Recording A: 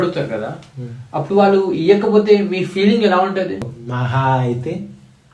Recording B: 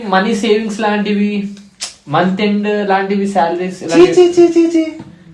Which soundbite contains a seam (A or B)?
A